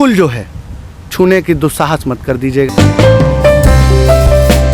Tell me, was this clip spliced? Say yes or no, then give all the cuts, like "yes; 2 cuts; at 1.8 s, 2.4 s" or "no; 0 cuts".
yes; 1 cut; at 2.7 s